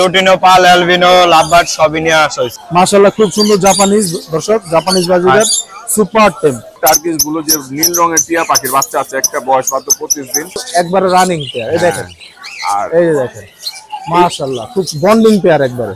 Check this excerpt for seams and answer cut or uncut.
cut